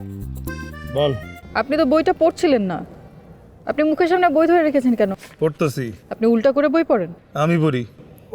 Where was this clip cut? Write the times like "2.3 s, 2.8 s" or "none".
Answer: 1.3 s